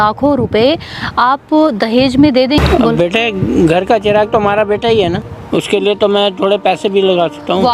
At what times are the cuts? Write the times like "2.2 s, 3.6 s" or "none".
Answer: 2.6 s, 5.3 s